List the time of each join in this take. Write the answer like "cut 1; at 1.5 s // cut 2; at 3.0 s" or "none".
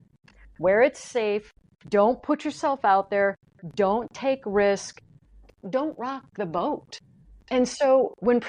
cut 1; at 5.6 s // cut 2; at 7.4 s